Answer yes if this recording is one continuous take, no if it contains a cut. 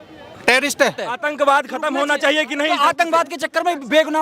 no